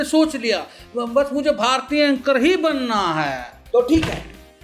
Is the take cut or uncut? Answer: uncut